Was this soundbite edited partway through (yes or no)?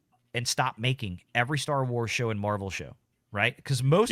no